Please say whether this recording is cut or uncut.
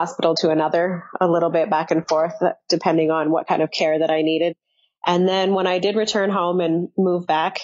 uncut